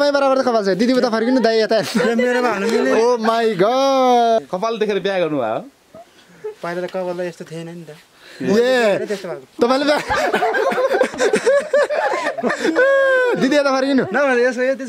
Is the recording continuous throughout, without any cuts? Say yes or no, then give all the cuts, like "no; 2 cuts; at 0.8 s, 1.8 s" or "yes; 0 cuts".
no; 1 cut; at 4.4 s